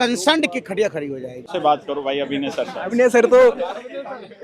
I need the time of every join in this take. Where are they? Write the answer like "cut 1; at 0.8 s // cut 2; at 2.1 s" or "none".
cut 1; at 1.5 s